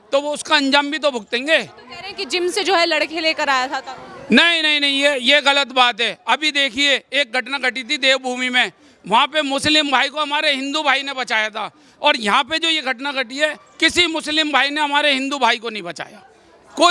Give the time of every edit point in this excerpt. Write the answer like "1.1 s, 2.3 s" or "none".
none